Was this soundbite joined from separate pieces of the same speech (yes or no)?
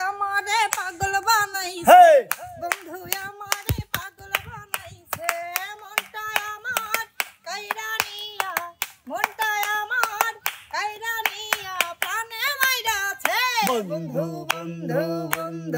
no